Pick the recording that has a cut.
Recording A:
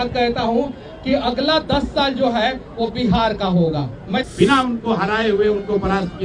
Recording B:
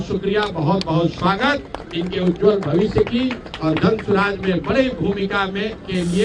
A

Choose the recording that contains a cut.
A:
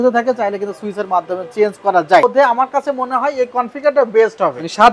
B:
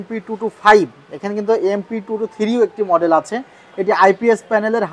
A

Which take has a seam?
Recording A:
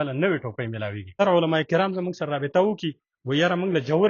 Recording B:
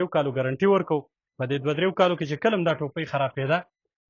A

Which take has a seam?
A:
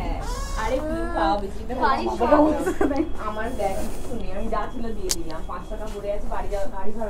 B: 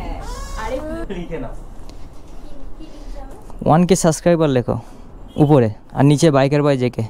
B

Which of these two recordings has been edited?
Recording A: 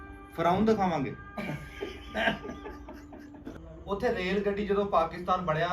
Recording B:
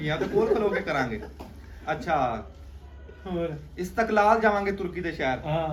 A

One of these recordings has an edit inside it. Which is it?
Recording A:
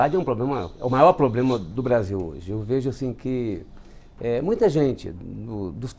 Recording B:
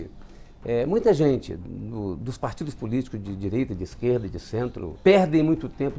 B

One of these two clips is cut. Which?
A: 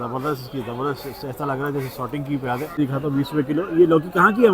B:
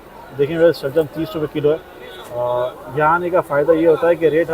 A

